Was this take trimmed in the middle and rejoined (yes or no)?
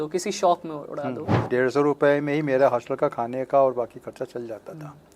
yes